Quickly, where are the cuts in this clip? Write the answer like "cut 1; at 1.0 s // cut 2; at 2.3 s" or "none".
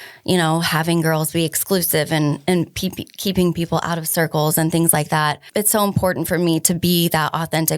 cut 1; at 5.4 s